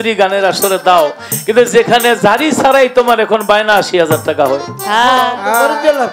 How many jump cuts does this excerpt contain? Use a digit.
0